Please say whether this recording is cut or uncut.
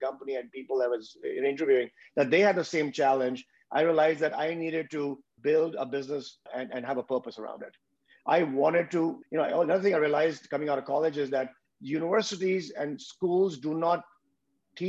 cut